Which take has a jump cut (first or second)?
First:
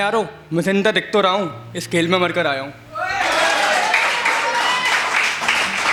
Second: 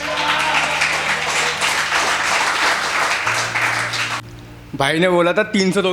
second